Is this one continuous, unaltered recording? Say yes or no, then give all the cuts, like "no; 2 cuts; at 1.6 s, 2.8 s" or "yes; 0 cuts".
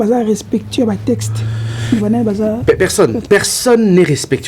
yes; 0 cuts